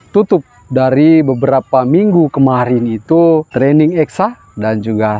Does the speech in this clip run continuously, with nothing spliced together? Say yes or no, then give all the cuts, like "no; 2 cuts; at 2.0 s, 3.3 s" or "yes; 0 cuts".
no; 1 cut; at 3.5 s